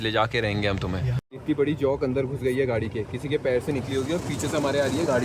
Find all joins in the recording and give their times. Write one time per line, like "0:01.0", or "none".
0:01.2